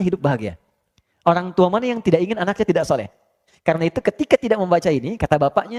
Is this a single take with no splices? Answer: yes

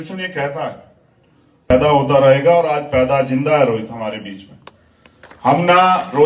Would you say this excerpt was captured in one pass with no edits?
no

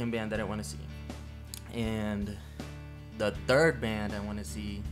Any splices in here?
no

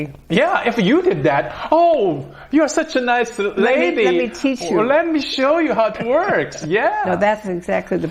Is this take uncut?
no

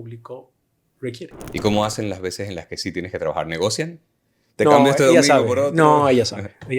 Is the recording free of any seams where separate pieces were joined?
no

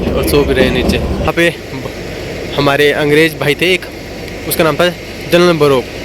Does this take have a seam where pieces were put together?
yes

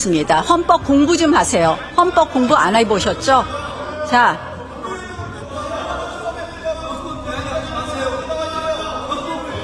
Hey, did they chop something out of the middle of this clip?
no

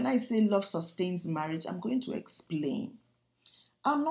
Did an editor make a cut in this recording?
no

